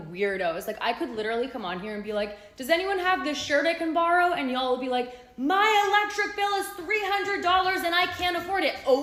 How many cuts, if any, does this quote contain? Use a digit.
0